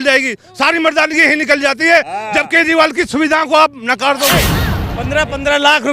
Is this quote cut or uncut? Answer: cut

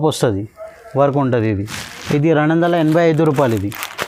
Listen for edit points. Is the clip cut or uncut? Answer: uncut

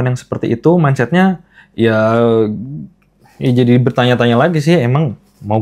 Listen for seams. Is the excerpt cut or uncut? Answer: uncut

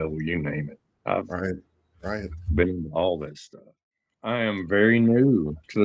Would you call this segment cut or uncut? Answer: cut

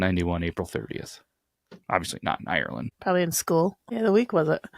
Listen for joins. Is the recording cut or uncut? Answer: cut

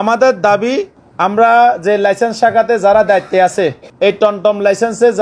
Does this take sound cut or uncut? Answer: cut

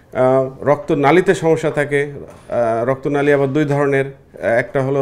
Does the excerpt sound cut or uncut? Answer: uncut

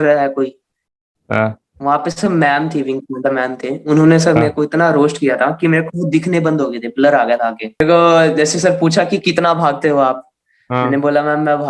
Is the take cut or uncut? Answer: cut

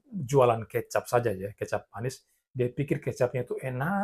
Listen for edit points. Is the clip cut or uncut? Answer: uncut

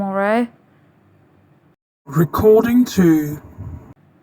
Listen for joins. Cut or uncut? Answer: cut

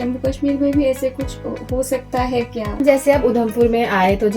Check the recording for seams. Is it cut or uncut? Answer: cut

